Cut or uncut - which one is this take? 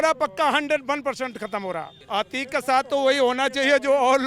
cut